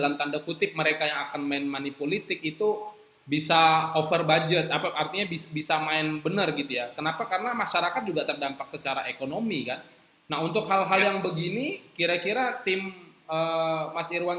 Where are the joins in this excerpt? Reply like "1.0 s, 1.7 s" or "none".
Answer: none